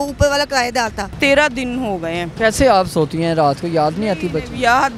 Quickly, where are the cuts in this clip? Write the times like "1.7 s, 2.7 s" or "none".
1.2 s, 2.3 s